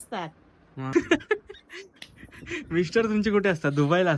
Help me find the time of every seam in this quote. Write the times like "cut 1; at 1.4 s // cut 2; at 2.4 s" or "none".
cut 1; at 0.9 s